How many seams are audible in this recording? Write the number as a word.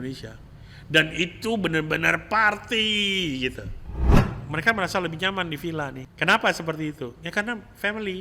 two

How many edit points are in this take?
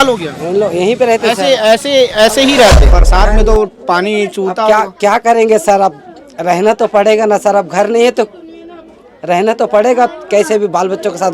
one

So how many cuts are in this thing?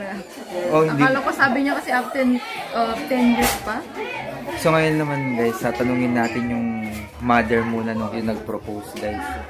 two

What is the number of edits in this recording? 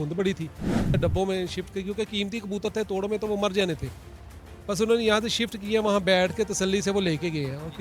one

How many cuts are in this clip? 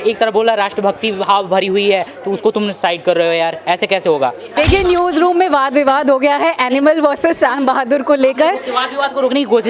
one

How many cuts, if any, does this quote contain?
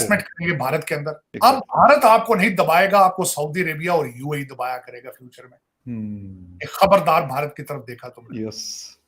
one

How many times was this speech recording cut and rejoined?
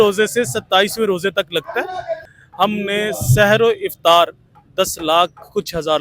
one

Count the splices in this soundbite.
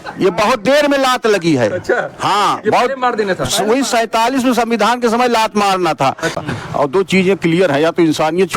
one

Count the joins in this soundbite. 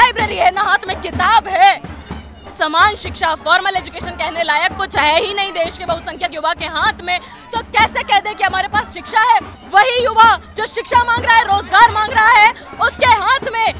one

